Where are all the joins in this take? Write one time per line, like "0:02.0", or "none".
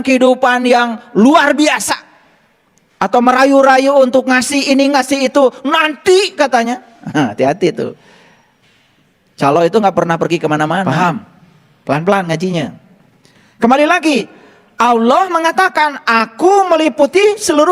0:10.8